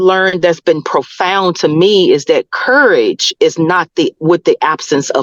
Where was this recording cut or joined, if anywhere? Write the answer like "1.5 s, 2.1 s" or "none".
none